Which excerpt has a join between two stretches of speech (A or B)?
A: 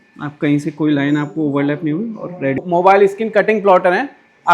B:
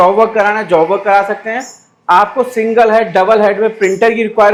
A